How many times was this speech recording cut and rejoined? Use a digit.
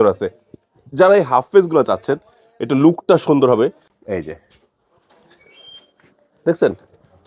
1